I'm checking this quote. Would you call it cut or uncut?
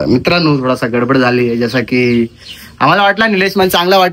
uncut